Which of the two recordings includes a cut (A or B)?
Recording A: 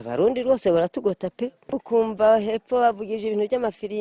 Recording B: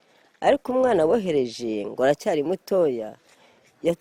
A